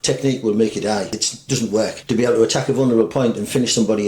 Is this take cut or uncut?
cut